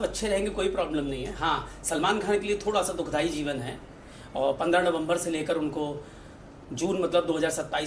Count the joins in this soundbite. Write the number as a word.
zero